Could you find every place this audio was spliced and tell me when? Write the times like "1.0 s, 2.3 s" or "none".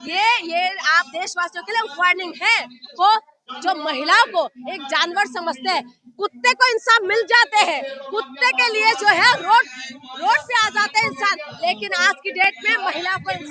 2.9 s

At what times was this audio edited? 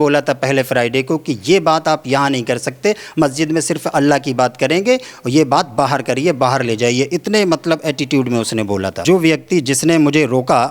9.0 s

